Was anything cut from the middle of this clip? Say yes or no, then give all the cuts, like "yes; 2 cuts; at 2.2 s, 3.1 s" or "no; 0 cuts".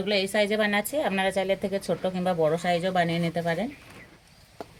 no; 0 cuts